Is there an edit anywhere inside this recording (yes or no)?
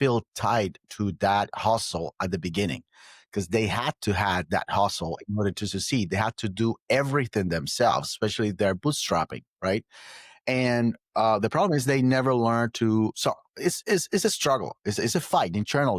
no